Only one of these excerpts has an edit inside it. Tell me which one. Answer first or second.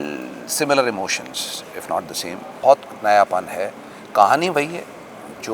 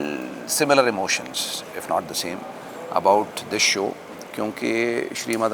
first